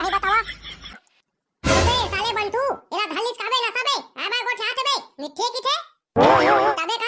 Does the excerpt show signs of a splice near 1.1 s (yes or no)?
yes